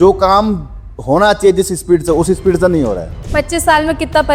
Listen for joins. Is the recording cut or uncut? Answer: cut